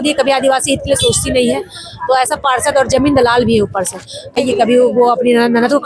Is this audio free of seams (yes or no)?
no